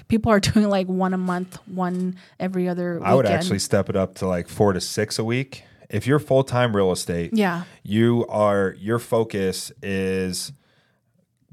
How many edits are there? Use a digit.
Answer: 0